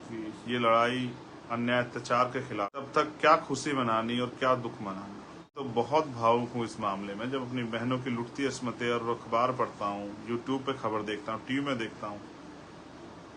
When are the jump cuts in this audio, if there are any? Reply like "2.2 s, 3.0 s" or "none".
2.9 s, 5.7 s